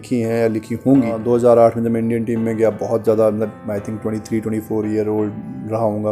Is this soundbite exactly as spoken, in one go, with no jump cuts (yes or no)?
no